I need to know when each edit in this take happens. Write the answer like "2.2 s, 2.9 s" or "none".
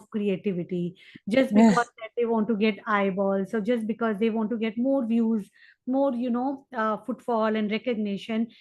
none